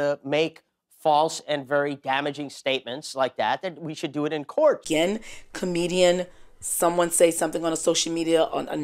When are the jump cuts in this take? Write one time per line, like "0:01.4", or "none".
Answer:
0:04.8